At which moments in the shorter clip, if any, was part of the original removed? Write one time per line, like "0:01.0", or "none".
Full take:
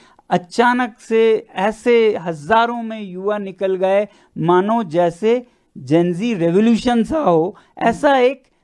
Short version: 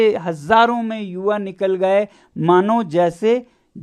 none